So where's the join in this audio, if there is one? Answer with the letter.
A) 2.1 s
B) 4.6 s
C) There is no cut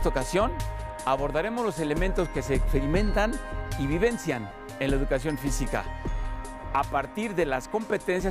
C